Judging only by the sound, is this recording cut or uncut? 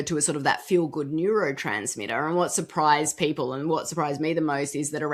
uncut